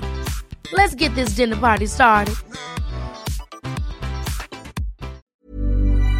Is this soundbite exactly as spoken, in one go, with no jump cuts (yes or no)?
no